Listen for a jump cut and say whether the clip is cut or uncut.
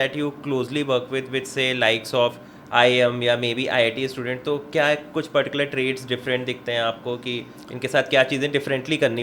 uncut